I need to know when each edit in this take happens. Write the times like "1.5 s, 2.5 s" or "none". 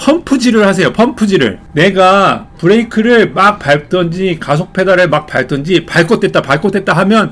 1.6 s